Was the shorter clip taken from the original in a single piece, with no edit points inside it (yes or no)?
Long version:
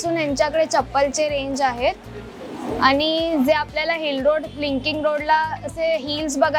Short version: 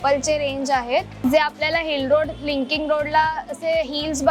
no